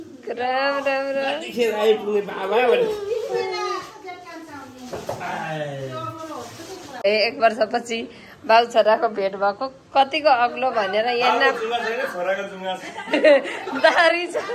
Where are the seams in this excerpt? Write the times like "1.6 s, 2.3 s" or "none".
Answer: none